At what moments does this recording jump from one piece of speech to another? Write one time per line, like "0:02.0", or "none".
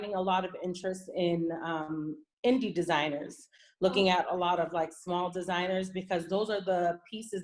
none